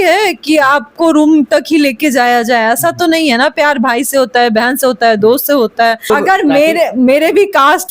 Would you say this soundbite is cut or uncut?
cut